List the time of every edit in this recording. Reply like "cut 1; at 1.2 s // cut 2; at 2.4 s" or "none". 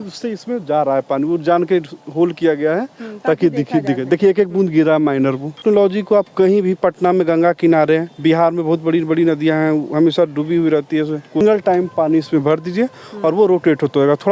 cut 1; at 5.6 s // cut 2; at 11.4 s